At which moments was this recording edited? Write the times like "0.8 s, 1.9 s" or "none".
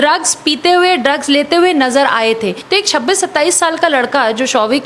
2.6 s